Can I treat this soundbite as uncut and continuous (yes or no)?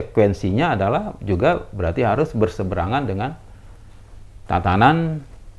yes